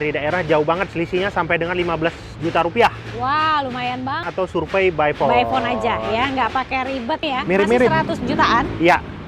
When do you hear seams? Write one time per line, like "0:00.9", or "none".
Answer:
0:04.2
0:07.3